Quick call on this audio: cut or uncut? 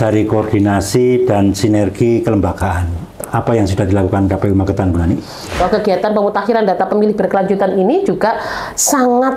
cut